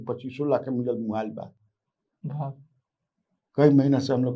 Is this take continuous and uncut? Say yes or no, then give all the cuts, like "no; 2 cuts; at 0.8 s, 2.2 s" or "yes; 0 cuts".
yes; 0 cuts